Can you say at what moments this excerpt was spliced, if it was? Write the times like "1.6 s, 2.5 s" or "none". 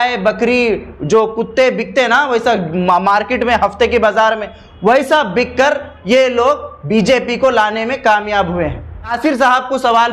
9.1 s